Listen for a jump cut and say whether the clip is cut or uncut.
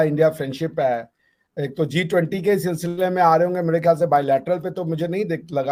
uncut